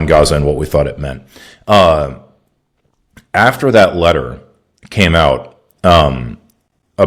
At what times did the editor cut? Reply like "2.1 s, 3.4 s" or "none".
none